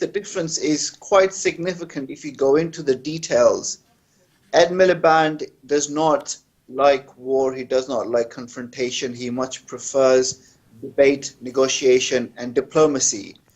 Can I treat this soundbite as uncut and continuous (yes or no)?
no